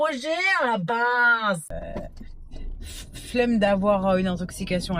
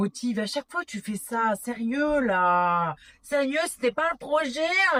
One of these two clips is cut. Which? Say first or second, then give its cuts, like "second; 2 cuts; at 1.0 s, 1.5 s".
first; 1 cut; at 1.7 s